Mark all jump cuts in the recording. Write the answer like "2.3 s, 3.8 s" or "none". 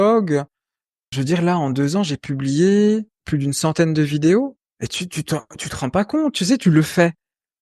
1.1 s, 3.2 s, 4.6 s